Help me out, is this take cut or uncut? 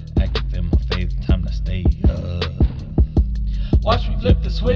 uncut